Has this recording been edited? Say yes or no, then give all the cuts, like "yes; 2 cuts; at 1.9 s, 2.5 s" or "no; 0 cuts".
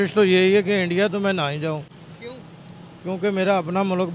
no; 0 cuts